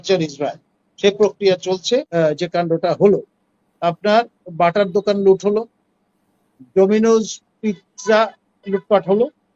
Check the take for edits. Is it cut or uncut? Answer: cut